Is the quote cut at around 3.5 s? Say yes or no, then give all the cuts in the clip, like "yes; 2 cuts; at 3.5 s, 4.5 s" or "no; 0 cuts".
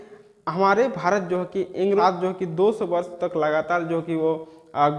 no; 1 cut; at 2.0 s